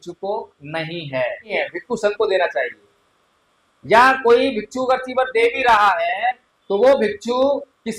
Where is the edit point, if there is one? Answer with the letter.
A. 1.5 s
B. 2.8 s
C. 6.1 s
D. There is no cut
A